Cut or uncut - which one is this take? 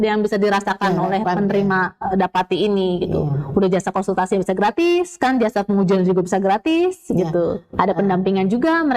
uncut